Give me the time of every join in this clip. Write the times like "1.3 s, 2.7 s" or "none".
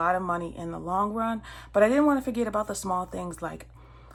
none